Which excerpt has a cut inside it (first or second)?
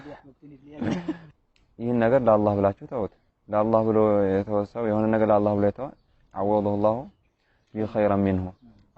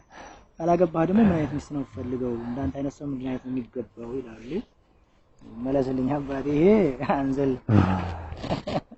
first